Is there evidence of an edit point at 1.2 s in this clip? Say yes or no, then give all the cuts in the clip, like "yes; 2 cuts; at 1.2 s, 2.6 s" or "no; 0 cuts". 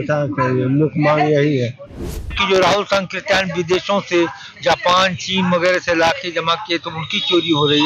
no; 1 cut; at 2.4 s